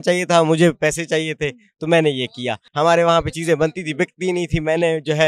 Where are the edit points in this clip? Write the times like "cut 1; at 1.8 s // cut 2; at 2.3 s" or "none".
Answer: cut 1; at 2.6 s

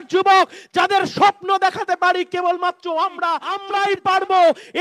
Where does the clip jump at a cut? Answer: cut 1; at 3.6 s

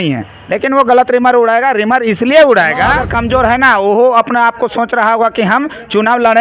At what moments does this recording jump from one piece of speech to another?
cut 1; at 3.0 s

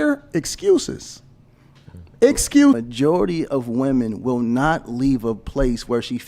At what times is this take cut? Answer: cut 1; at 2.8 s

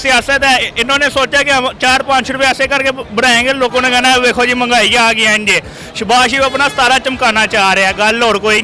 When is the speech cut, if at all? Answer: none

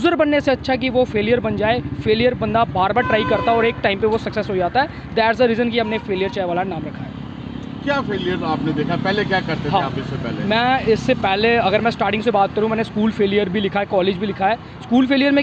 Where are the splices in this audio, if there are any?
none

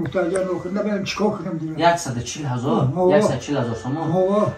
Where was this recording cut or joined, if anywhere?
none

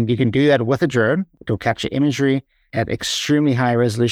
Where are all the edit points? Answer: cut 1; at 1.3 s // cut 2; at 2.6 s

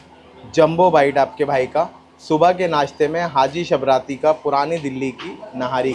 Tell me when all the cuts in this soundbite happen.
none

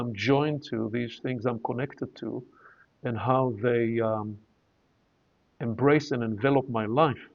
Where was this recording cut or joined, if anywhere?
none

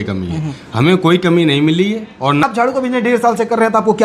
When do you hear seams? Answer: cut 1; at 2.4 s

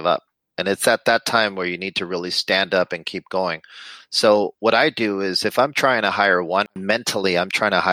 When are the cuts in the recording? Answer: cut 1; at 6.7 s

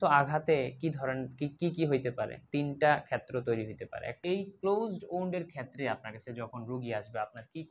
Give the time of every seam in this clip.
cut 1; at 4.0 s

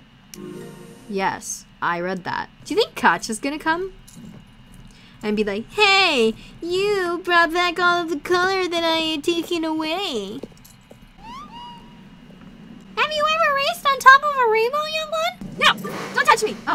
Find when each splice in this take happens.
cut 1; at 2.5 s // cut 2; at 11.2 s // cut 3; at 12.7 s // cut 4; at 15.4 s

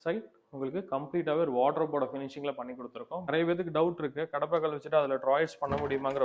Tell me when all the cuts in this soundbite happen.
cut 1; at 3.3 s

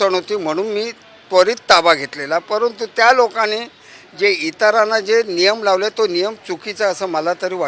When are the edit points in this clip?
none

